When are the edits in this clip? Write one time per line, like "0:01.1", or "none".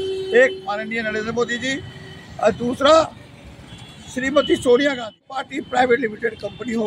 0:05.6

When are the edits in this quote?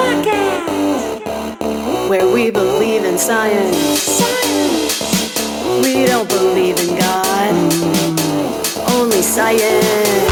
none

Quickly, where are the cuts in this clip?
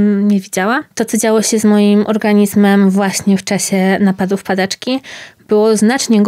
0:00.9

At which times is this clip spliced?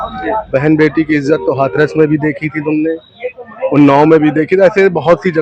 none

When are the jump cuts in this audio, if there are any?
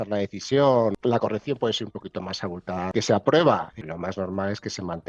0:01.0
0:02.9
0:03.7

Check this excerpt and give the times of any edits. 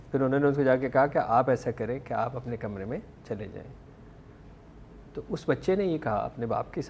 none

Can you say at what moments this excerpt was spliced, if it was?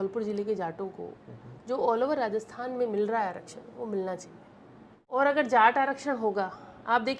0:05.2

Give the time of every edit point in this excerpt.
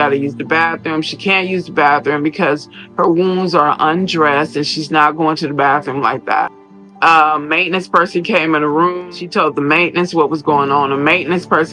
0:09.1

